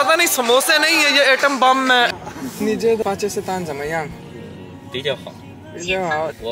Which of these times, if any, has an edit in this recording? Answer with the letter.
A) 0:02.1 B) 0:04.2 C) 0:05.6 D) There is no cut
A